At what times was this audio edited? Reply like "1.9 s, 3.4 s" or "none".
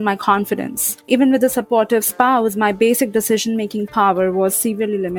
1.1 s